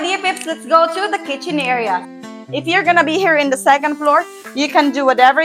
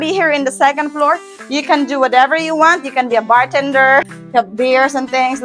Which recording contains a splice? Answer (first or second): first